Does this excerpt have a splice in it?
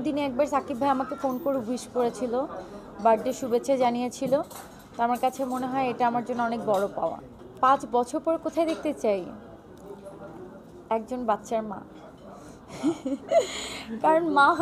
no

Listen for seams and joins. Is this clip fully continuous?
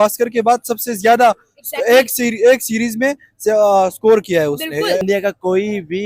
no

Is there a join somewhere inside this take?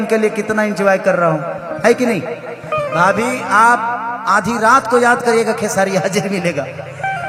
no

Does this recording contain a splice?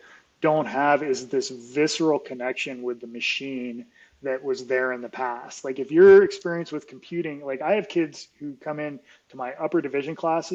no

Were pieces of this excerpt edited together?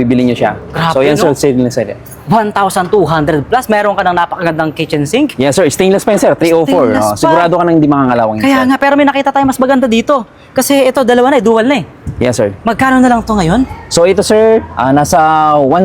no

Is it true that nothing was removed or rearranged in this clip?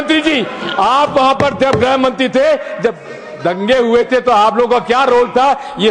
yes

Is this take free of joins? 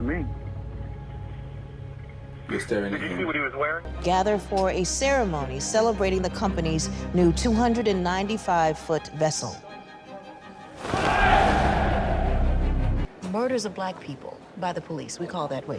no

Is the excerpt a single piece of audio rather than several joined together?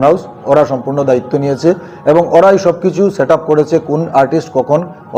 yes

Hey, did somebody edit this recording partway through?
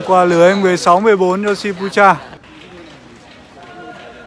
yes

